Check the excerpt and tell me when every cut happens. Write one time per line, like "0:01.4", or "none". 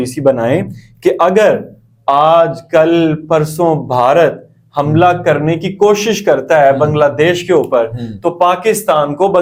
none